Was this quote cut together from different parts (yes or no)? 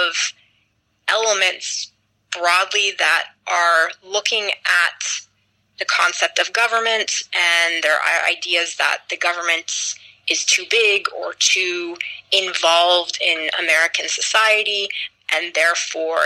no